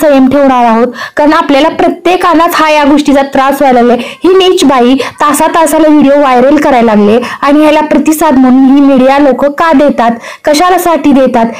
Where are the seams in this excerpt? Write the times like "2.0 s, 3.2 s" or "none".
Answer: none